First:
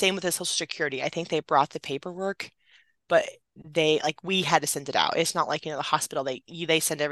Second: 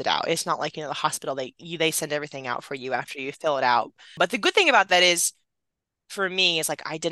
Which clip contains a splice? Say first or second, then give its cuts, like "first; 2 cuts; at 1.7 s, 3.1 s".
second; 1 cut; at 4.1 s